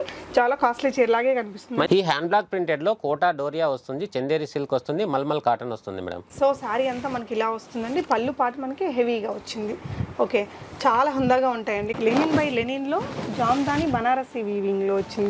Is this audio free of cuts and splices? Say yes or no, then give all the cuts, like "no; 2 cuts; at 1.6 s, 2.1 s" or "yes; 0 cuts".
no; 3 cuts; at 1.9 s, 6.2 s, 11.9 s